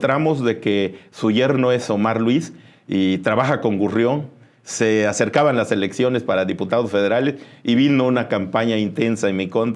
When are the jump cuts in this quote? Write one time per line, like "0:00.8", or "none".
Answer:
none